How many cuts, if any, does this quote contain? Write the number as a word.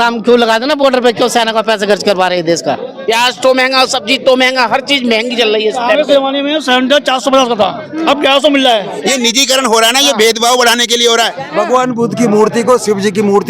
three